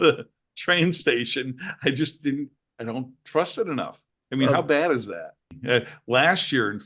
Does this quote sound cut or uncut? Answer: cut